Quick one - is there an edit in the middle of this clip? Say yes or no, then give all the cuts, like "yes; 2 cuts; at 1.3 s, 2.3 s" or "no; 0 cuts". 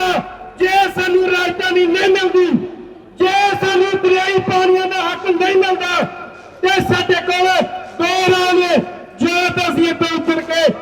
no; 0 cuts